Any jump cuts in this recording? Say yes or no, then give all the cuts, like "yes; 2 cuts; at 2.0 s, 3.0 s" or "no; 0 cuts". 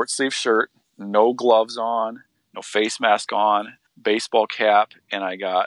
no; 0 cuts